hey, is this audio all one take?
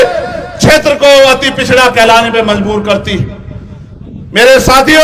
yes; 0 cuts

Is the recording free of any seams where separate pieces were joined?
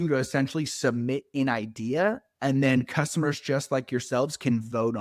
yes; 0 cuts

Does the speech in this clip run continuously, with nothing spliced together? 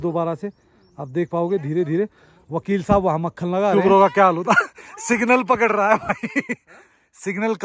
no; 1 cut; at 3.7 s

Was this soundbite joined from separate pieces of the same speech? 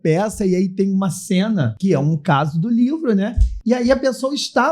yes; 2 cuts; at 1.7 s, 3.5 s

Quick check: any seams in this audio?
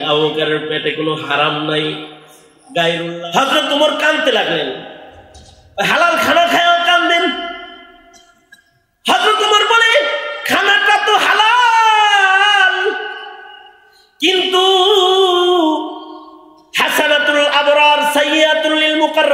yes; 1 cut; at 2.9 s

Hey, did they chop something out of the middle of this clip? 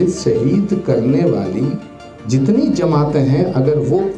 no; 0 cuts

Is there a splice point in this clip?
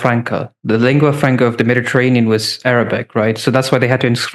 no; 0 cuts

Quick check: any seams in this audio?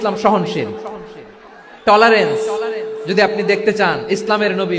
no; 0 cuts

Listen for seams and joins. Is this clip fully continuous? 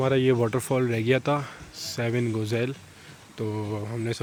yes; 0 cuts

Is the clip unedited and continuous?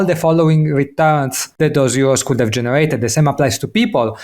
no; 1 cut; at 1.4 s

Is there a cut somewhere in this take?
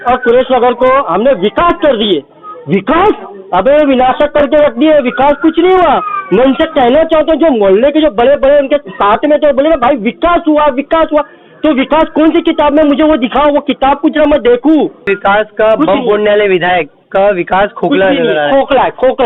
yes; 1 cut; at 15.1 s

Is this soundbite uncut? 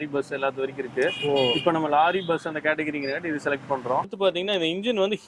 no; 1 cut; at 4.1 s

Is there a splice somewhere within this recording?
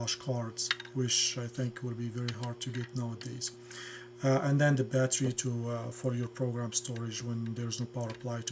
no; 0 cuts

